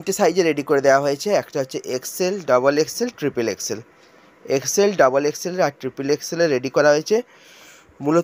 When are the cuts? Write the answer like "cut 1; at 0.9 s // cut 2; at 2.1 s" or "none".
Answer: none